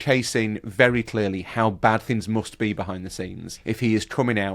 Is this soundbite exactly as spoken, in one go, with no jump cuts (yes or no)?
no